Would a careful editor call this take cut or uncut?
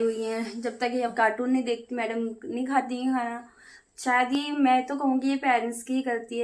uncut